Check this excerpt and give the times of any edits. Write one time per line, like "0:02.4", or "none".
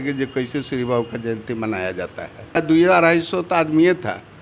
0:02.6